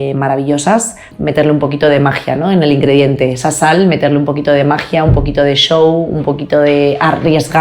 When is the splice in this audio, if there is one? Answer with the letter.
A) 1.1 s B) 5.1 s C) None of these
A